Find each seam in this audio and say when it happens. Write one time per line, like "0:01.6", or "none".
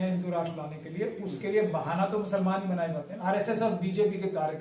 0:03.1